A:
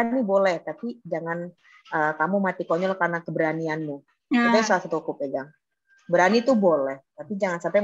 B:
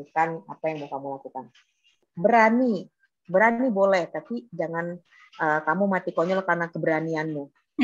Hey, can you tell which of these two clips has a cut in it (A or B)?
B